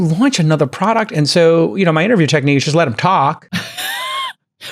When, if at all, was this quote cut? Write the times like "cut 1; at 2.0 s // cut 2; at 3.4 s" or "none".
cut 1; at 3.5 s